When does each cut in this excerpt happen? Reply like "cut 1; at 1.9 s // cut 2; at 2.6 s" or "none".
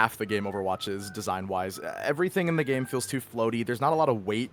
none